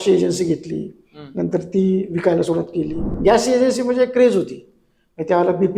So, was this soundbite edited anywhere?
yes; 1 cut; at 3.0 s

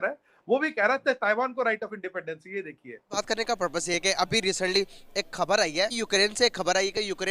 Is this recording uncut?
no; 1 cut; at 3.2 s

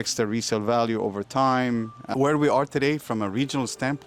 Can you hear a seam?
yes; 1 cut; at 2.0 s

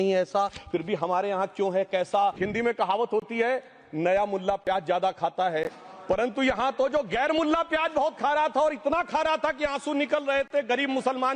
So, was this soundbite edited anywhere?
yes; 1 cut; at 2.4 s

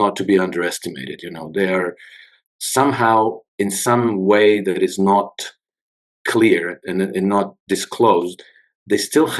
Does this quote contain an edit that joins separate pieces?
no; 0 cuts

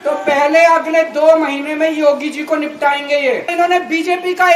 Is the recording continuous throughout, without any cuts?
no; 1 cut; at 3.5 s

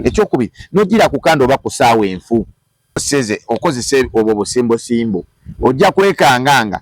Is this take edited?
yes; 1 cut; at 3.0 s

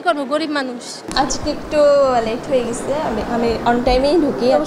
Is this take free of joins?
no; 1 cut; at 1.0 s

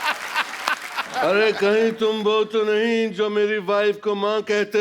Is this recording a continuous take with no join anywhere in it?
no; 1 cut; at 1.1 s

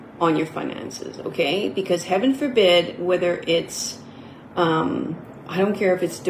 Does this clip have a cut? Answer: no; 0 cuts

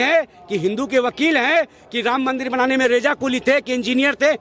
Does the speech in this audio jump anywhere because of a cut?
no; 0 cuts

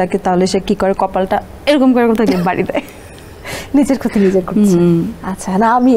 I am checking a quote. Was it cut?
no; 0 cuts

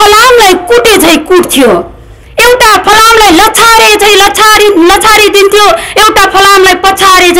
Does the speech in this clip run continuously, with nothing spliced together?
yes; 0 cuts

